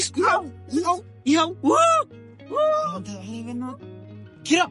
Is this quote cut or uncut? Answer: uncut